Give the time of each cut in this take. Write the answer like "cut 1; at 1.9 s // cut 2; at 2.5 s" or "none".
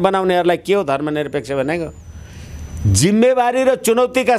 none